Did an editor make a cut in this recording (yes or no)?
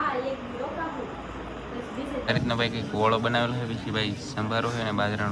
yes